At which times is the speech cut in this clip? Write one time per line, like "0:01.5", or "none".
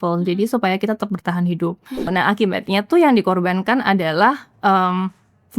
0:02.1